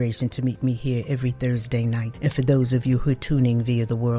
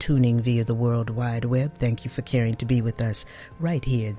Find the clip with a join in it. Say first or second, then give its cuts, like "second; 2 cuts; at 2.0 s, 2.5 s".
first; 1 cut; at 2.1 s